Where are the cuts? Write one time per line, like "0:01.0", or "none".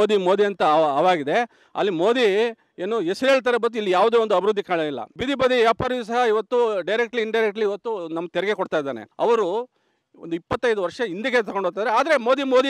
0:05.1
0:09.0

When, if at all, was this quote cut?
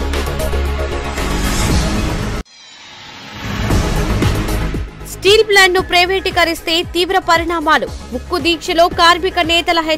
0:02.5
0:04.9

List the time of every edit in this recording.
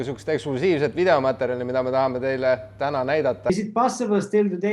0:03.5

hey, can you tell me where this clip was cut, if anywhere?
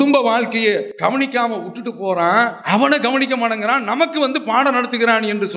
0:00.9
0:02.6

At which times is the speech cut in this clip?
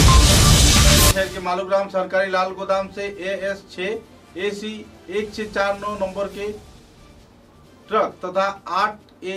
0:01.1

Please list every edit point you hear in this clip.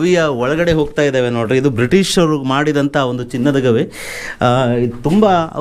none

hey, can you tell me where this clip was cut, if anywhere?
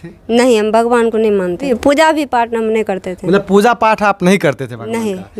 0:01.7

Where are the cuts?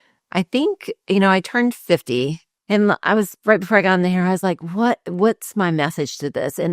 0:02.5

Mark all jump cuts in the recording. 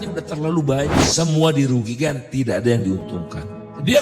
0:01.0

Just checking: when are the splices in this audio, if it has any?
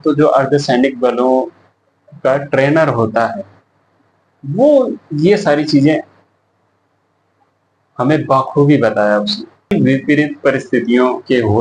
0:09.7

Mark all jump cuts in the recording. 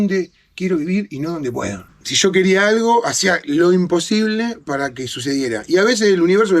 0:01.9

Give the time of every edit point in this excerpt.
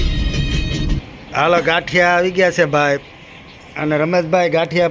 0:01.0

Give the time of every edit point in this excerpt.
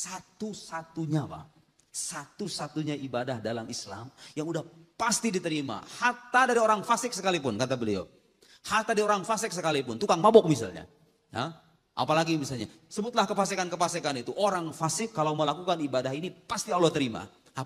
none

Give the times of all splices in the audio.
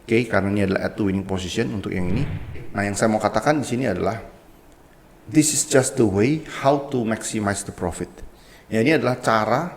0:02.6

